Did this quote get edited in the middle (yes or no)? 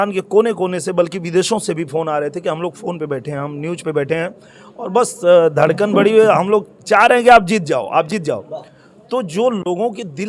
no